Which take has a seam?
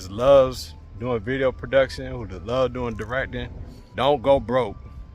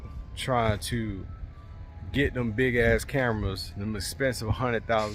first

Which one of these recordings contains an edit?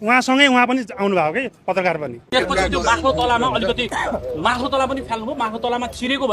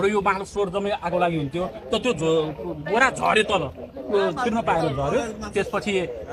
first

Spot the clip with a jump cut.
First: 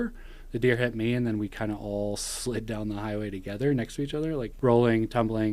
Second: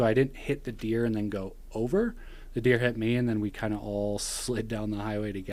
first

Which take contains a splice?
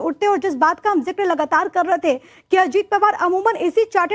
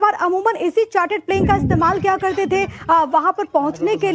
first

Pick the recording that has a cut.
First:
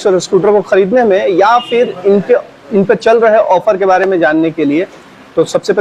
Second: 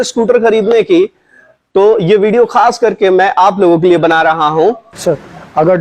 second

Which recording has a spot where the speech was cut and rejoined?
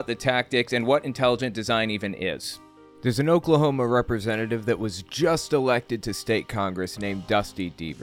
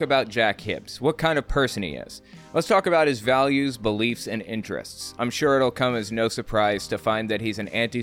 first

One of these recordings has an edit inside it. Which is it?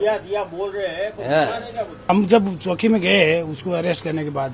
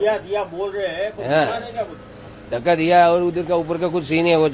first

